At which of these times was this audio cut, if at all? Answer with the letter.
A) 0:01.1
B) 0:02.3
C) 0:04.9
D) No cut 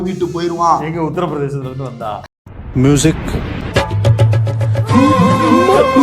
D